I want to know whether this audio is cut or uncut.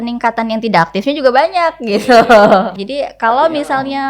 cut